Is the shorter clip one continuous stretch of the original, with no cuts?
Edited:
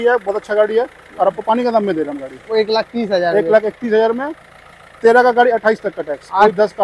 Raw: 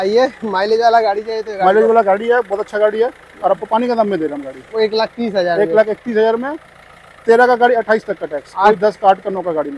yes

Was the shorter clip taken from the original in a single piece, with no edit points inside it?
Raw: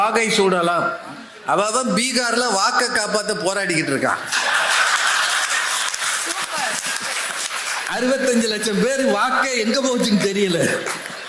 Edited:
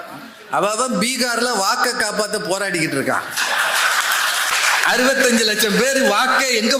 no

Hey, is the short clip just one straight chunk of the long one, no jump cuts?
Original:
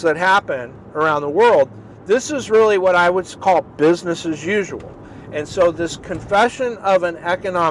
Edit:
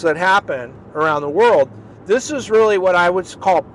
yes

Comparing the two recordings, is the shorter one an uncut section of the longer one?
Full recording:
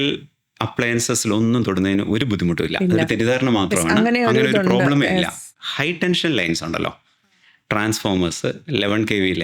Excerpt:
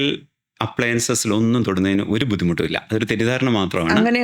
yes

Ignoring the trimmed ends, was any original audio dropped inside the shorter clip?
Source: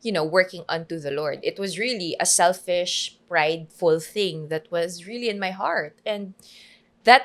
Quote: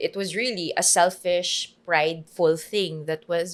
no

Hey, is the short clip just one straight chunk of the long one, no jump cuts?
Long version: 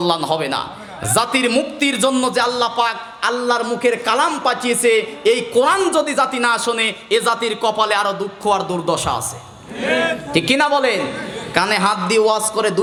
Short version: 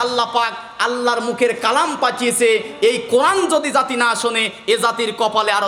yes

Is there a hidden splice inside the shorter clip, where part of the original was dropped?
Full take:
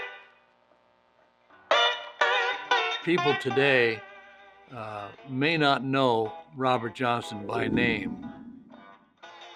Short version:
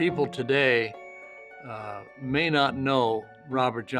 no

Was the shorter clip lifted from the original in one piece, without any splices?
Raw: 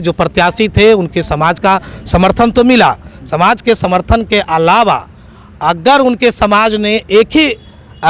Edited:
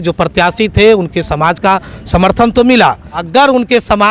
no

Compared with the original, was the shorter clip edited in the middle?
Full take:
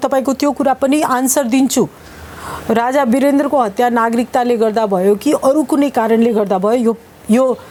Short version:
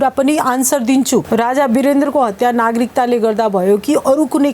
yes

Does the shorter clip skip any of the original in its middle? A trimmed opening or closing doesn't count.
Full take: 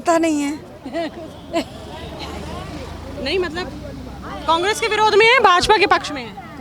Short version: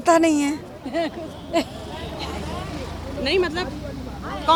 no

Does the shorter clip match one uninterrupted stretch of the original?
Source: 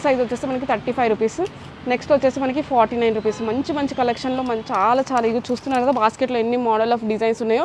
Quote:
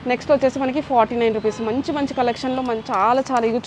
yes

